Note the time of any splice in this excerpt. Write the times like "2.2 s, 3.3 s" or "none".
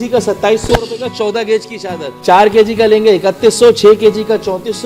2.1 s